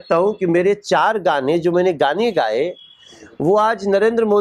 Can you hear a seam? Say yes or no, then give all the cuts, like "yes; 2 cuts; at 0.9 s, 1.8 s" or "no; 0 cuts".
no; 0 cuts